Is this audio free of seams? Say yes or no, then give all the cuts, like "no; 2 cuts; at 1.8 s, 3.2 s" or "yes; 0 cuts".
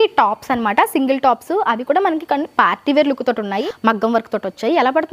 no; 1 cut; at 3.6 s